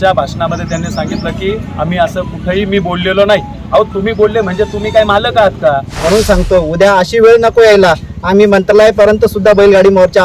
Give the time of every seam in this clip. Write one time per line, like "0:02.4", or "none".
0:05.9

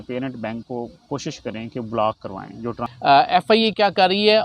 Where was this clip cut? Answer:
0:02.9

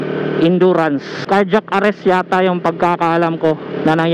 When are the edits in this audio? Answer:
0:01.2

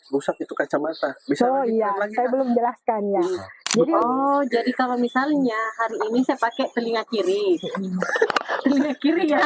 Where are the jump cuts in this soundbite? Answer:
0:04.0

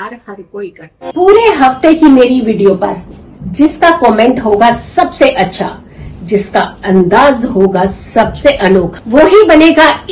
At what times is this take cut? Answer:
0:00.9

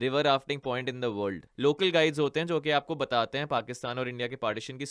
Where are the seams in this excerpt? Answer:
0:01.4

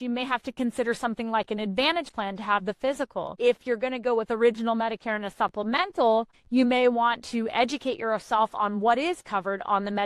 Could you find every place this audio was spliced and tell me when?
0:03.3
0:06.4

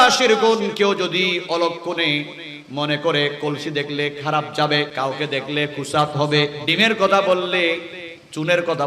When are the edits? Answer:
0:04.9
0:06.6

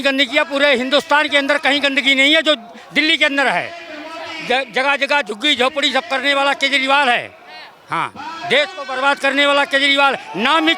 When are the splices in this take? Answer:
none

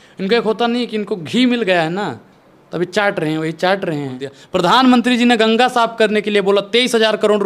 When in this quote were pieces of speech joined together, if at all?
0:04.3

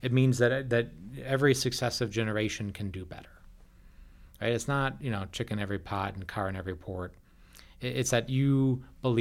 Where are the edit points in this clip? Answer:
none

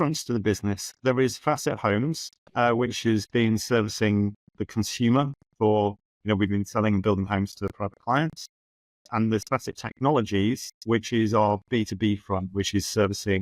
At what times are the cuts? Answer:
none

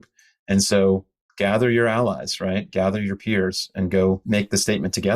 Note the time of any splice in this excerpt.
0:04.2

